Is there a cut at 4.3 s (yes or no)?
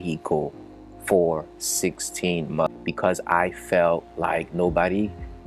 no